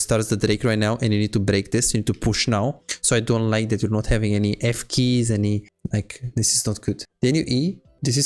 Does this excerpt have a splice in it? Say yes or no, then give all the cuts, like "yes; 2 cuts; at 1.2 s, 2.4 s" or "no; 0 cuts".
yes; 2 cuts; at 5.7 s, 7.1 s